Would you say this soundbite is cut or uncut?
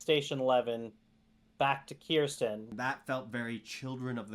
cut